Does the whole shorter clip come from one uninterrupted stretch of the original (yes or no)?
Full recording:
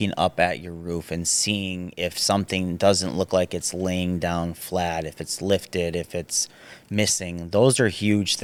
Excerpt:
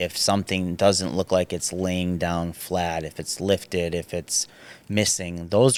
yes